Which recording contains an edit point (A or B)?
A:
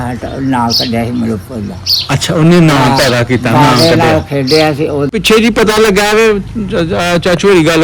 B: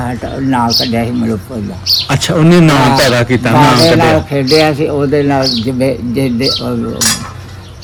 A